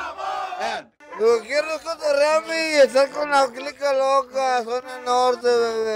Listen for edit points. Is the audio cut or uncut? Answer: cut